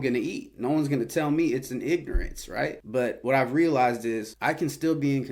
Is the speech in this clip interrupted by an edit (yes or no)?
yes